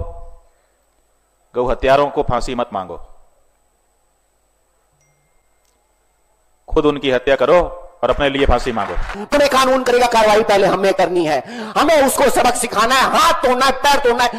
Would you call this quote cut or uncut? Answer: cut